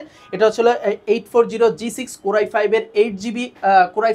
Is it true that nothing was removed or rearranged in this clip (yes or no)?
yes